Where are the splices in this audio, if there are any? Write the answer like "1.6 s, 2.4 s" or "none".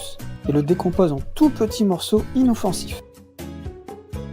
2.7 s